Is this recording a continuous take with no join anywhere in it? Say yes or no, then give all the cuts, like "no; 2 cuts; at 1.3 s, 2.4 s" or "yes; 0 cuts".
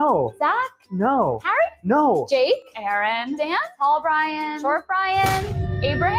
yes; 0 cuts